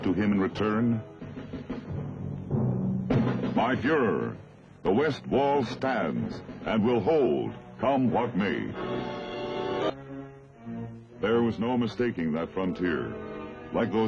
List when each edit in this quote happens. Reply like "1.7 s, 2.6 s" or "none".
9.8 s